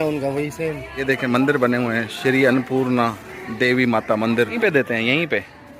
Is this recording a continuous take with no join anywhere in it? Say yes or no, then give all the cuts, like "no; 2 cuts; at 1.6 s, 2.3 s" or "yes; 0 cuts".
no; 2 cuts; at 1.0 s, 4.6 s